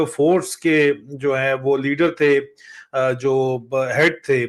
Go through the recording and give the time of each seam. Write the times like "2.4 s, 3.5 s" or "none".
none